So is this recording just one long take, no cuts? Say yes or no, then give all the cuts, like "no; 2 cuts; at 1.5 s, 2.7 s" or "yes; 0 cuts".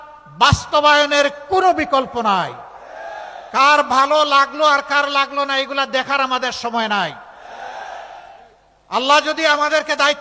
no; 1 cut; at 6.9 s